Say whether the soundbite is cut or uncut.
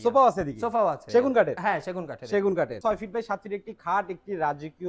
cut